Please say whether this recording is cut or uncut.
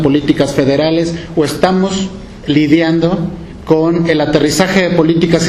cut